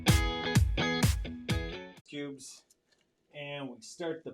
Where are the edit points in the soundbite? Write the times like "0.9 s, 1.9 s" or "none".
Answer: 1.9 s